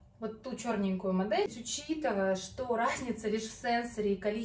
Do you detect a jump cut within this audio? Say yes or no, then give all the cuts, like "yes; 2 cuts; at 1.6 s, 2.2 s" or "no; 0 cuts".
yes; 1 cut; at 1.5 s